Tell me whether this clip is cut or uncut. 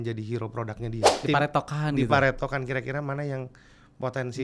cut